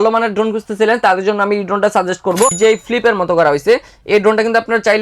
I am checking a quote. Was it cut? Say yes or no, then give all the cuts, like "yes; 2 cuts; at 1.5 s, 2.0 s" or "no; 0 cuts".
yes; 1 cut; at 2.5 s